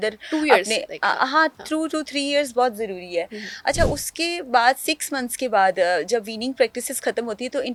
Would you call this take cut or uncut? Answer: uncut